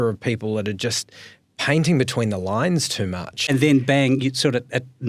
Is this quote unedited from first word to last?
no; 1 cut; at 3.4 s

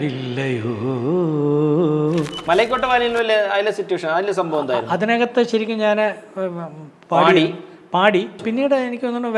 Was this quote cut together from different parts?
yes; 2 cuts; at 2.4 s, 8.4 s

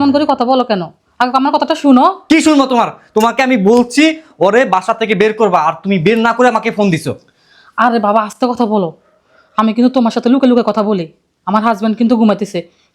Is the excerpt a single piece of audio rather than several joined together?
yes; 0 cuts

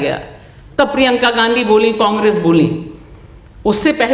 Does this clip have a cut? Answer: no; 0 cuts

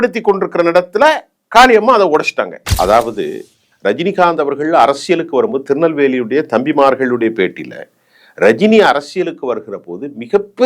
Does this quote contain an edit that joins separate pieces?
yes; 1 cut; at 2.6 s

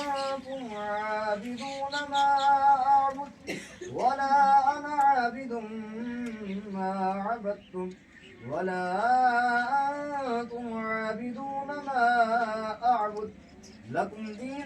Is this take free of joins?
yes; 0 cuts

